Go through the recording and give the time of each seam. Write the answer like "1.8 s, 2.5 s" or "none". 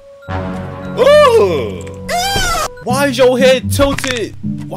none